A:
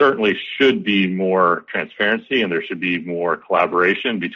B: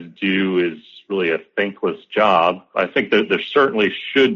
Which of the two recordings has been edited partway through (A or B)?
B